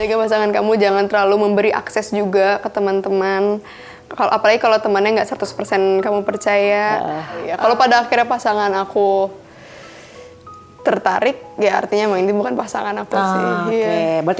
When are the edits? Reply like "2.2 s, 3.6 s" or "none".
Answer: 7.5 s